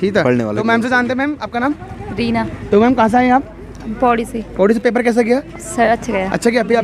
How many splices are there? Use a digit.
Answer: 0